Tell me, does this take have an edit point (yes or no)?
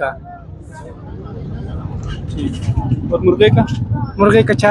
no